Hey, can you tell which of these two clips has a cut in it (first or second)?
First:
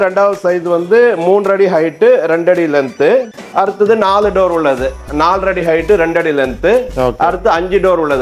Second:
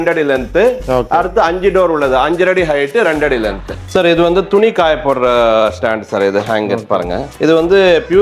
second